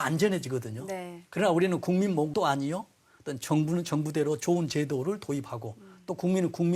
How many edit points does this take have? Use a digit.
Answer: 1